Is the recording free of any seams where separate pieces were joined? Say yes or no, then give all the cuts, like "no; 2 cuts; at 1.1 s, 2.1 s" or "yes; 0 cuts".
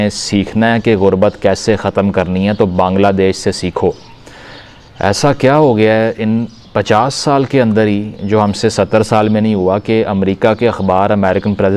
yes; 0 cuts